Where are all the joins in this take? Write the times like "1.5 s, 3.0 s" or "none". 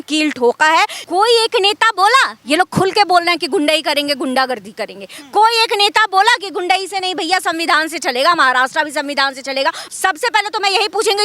1.0 s, 9.9 s